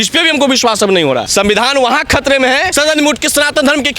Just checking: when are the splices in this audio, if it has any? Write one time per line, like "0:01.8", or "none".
0:01.3
0:02.7